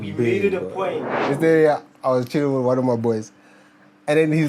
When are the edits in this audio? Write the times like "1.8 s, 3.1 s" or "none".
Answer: 1.1 s